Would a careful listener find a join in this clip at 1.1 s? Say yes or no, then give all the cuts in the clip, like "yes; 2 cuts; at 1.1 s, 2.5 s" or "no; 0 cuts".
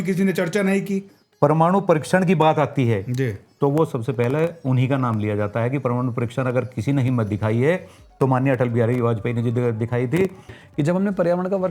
yes; 2 cuts; at 1.1 s, 10.6 s